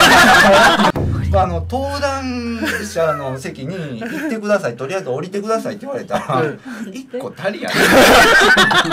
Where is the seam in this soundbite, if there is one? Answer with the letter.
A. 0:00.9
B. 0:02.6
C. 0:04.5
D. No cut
A